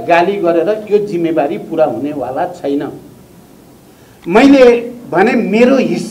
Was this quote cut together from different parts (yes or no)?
no